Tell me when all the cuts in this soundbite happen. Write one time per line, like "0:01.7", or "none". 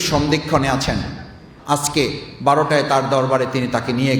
0:01.5